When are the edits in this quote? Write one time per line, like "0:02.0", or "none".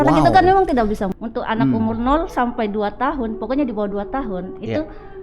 0:01.1